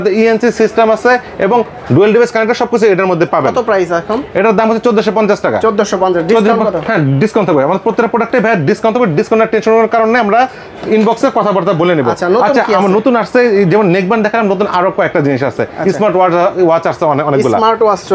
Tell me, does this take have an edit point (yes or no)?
no